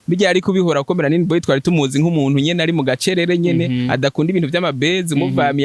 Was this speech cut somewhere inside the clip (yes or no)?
no